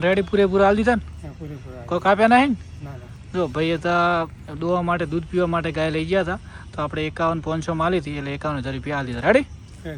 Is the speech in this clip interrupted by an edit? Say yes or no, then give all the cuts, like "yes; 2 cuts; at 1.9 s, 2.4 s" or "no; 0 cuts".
no; 0 cuts